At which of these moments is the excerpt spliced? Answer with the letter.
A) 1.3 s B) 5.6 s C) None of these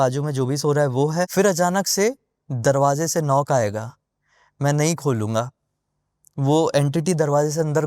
A